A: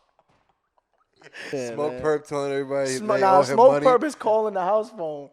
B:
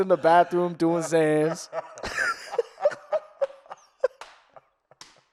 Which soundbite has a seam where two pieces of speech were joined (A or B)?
A